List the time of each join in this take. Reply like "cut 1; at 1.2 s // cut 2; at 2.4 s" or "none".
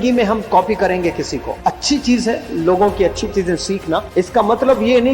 cut 1; at 1.4 s // cut 2; at 4.1 s